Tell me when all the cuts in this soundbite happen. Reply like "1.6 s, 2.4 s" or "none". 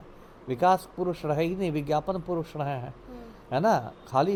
none